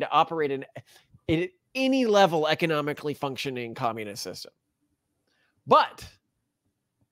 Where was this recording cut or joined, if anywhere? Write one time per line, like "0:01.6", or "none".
none